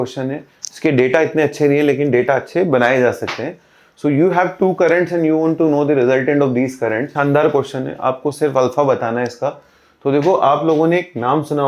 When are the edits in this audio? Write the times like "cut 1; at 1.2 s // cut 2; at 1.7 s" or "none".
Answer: cut 1; at 7.1 s